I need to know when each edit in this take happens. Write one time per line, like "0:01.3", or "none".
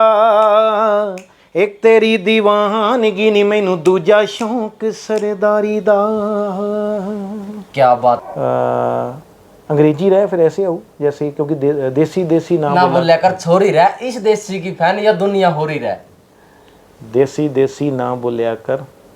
0:08.2